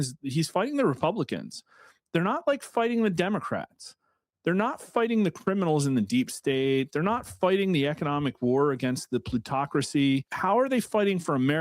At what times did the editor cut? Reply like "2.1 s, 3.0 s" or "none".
10.3 s